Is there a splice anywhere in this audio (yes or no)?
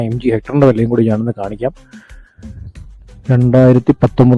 no